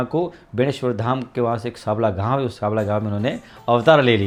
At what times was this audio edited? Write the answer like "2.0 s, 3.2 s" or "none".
none